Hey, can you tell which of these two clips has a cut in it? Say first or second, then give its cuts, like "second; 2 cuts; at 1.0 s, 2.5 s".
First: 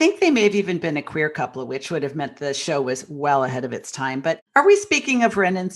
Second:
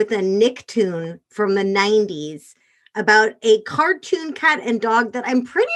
first; 1 cut; at 4.4 s